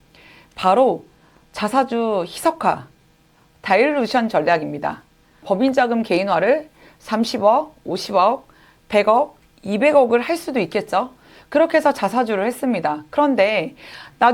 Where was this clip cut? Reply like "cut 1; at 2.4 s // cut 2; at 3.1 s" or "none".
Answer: cut 1; at 5.4 s